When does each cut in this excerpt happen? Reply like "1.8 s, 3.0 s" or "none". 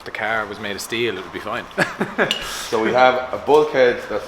none